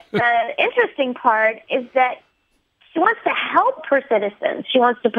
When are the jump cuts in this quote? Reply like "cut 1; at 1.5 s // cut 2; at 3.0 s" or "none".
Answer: cut 1; at 3.8 s